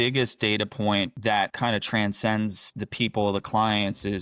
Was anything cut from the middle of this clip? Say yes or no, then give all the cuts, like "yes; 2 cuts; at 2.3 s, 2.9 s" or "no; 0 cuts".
yes; 1 cut; at 1.4 s